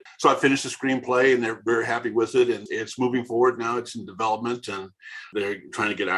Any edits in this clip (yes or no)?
no